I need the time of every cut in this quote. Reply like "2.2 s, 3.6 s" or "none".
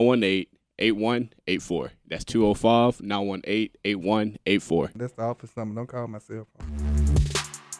6.7 s